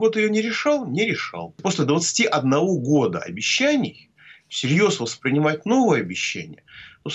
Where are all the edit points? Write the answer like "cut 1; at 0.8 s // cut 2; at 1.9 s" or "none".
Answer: cut 1; at 1.6 s